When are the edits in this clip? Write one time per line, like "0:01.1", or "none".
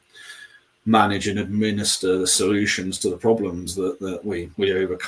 none